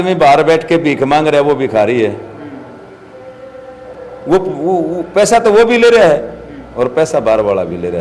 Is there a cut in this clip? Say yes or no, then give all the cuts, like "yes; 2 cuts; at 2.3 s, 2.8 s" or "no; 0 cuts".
no; 0 cuts